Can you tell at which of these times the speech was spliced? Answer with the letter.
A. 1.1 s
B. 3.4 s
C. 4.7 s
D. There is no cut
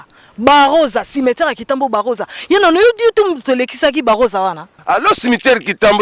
C